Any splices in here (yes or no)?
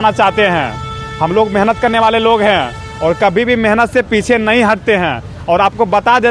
no